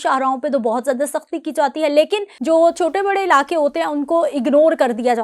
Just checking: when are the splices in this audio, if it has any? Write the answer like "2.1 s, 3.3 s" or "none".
2.3 s